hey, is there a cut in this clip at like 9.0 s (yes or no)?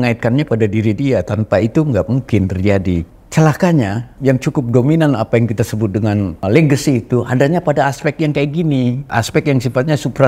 yes